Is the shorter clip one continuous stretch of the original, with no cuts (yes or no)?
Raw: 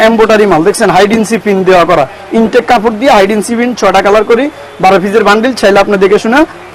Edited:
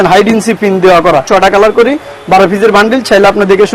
no